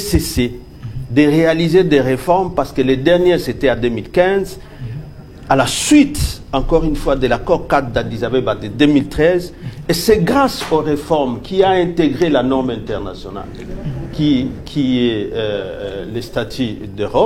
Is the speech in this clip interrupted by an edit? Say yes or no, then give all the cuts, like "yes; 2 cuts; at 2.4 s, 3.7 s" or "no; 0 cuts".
no; 0 cuts